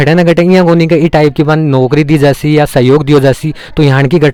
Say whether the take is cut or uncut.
uncut